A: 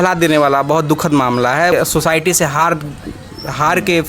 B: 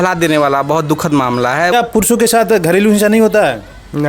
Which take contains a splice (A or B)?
B